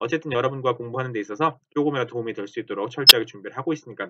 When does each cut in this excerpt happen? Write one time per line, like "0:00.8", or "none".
none

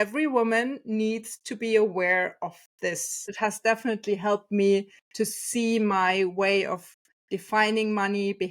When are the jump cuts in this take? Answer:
0:03.3

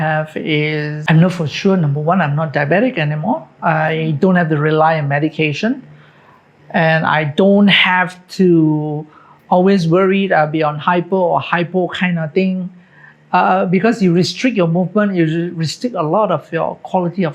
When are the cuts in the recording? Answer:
0:00.9

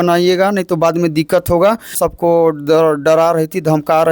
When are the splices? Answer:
0:02.0

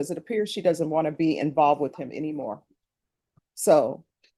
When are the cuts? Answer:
none

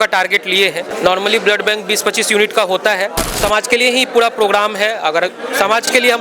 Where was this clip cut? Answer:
0:00.9
0:03.4

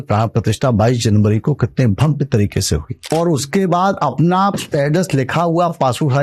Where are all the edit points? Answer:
0:02.9
0:04.6

